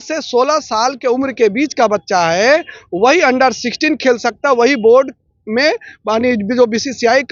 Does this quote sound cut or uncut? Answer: uncut